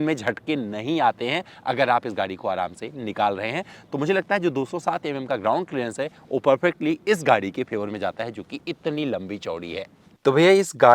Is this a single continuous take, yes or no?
yes